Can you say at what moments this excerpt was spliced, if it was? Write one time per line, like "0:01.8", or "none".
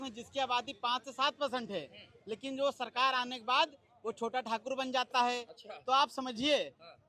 none